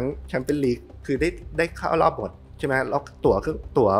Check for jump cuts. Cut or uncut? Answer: uncut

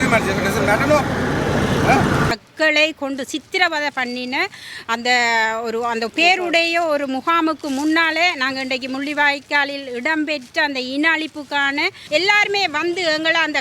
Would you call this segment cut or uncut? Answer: cut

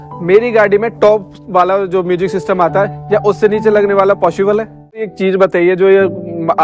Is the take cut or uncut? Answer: cut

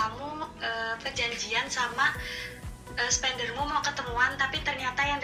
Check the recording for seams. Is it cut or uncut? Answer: uncut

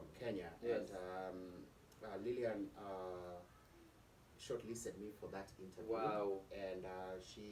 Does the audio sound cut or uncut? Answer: uncut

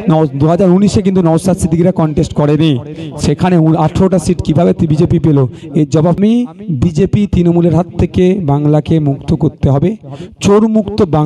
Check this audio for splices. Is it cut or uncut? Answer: cut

